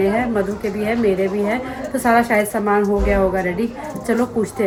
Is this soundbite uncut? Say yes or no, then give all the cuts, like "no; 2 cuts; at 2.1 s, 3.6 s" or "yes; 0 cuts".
yes; 0 cuts